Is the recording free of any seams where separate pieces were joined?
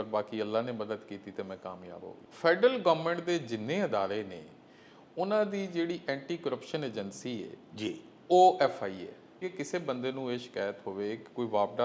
no; 2 cuts; at 2.2 s, 9.4 s

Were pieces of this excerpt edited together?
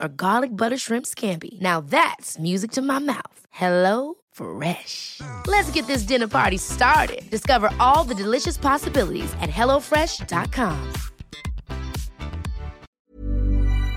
yes; 1 cut; at 12.9 s

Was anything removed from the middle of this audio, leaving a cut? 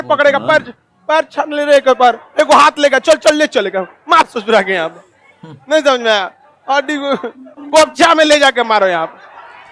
no; 0 cuts

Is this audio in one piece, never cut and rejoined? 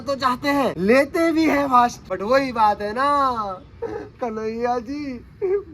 no; 2 cuts; at 0.8 s, 2.1 s

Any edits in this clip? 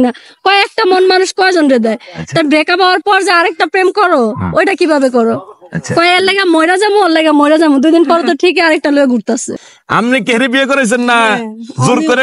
yes; 1 cut; at 9.6 s

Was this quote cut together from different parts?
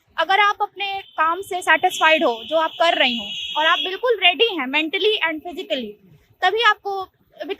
no; 0 cuts

